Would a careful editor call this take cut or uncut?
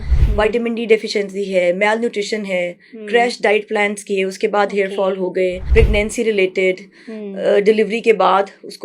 cut